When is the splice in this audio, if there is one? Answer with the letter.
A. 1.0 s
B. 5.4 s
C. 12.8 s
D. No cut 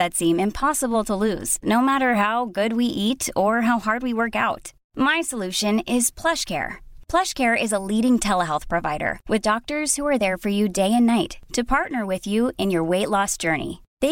D